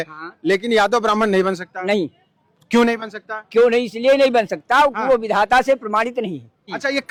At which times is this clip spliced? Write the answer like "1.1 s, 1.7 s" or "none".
none